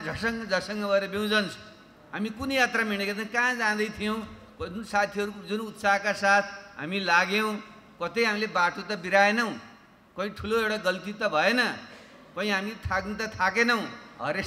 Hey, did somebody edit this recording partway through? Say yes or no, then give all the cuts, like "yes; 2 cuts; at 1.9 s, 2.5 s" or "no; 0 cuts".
no; 0 cuts